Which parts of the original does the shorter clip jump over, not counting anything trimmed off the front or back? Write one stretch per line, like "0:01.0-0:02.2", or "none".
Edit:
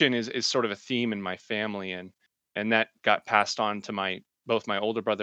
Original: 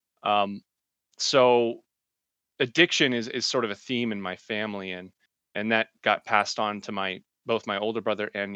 none